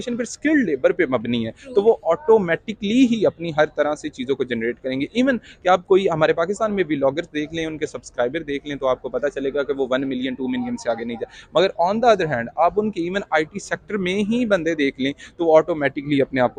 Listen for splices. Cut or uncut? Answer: uncut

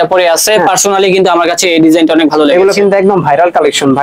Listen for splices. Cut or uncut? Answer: uncut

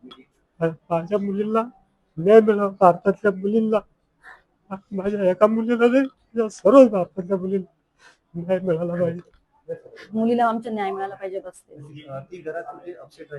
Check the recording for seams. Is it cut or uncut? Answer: cut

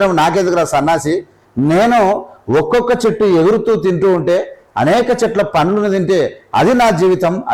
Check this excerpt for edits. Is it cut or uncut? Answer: uncut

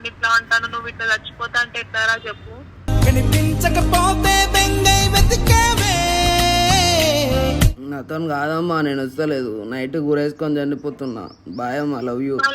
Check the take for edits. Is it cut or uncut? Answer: cut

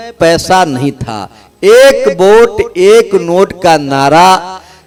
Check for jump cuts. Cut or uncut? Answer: uncut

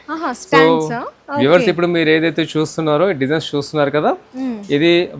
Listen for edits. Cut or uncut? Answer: uncut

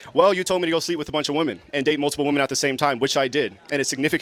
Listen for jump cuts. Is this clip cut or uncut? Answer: uncut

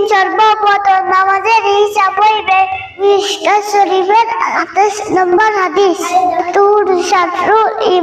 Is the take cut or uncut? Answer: cut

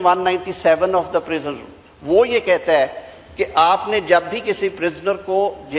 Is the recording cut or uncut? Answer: uncut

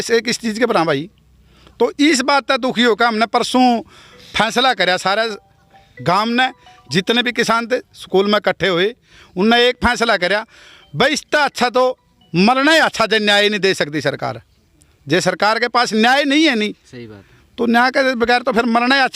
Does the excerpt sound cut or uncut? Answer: uncut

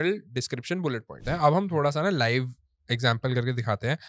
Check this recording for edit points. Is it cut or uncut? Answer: cut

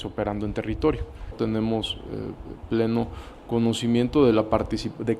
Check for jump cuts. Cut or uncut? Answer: cut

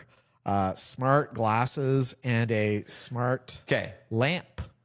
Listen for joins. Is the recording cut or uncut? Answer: uncut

